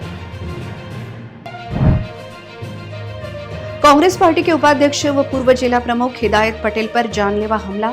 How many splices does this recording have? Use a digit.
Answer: 1